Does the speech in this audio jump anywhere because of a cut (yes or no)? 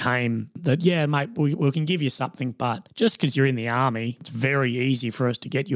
yes